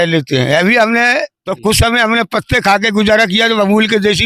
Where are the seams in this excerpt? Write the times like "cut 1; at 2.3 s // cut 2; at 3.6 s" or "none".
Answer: cut 1; at 1.4 s